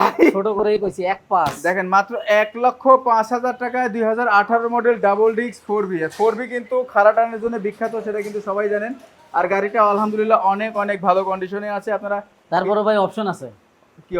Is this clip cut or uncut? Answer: uncut